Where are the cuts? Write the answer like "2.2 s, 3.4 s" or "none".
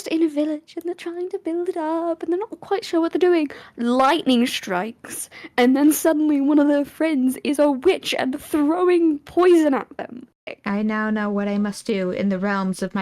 10.6 s